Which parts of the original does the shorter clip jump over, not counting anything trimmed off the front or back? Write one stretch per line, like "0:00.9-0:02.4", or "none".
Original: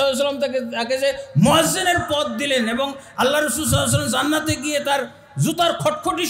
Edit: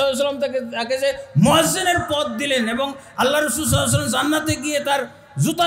none